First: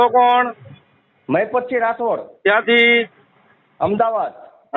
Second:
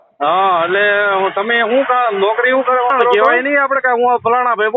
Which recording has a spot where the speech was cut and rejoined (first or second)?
second